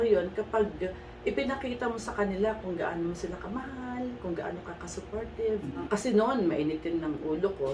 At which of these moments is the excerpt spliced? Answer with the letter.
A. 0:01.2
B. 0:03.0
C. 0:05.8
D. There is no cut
C